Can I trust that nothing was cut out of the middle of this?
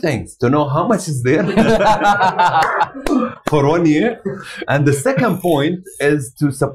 yes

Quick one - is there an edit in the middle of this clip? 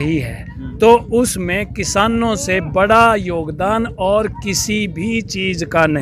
no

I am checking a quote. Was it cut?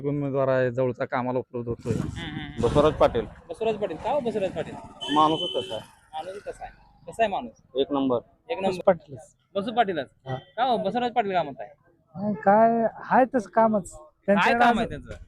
yes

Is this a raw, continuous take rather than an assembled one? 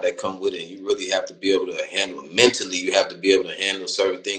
yes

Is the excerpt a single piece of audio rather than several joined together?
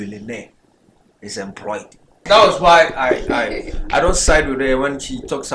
no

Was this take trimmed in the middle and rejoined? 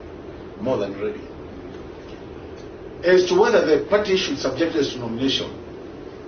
no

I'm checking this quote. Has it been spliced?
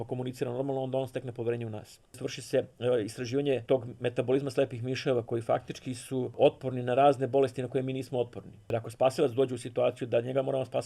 yes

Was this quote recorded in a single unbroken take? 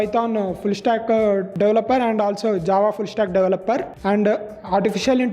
no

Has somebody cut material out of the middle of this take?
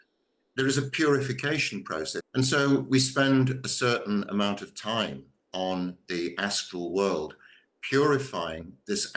yes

